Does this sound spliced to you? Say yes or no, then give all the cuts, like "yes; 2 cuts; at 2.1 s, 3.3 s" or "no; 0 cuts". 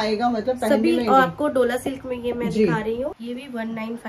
yes; 1 cut; at 3.2 s